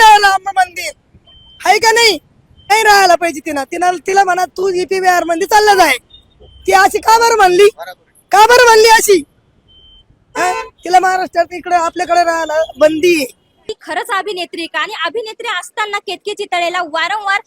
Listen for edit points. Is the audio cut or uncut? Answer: cut